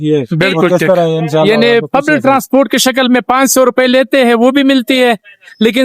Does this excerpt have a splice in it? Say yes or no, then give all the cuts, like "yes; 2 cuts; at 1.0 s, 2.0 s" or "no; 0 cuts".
yes; 1 cut; at 1.5 s